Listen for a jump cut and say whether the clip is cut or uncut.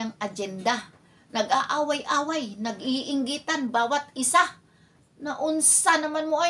uncut